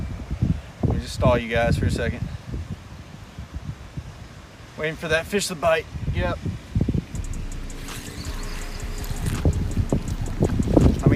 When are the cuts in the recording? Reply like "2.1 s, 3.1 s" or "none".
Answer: none